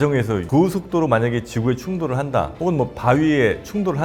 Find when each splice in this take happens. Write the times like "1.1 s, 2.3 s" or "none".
none